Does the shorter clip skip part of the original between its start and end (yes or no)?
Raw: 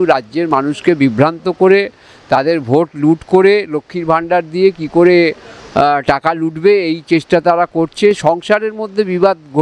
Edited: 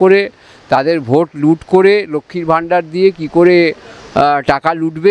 no